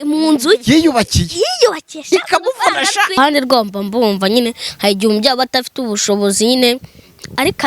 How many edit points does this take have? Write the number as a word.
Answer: one